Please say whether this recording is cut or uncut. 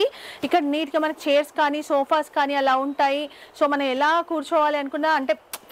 uncut